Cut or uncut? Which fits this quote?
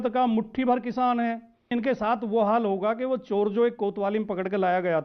cut